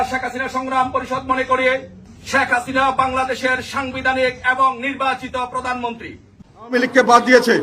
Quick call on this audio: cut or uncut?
cut